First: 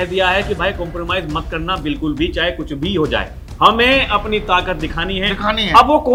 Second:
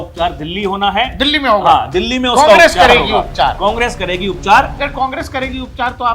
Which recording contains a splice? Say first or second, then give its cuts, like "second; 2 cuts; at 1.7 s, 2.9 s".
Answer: second; 1 cut; at 4.8 s